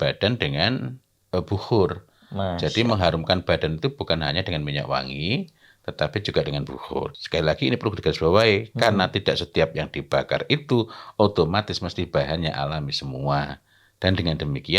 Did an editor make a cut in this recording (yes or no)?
yes